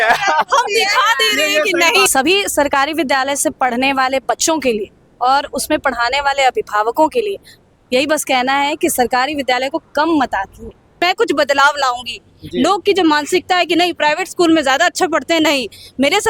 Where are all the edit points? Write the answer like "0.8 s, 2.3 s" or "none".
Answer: 2.1 s, 11.0 s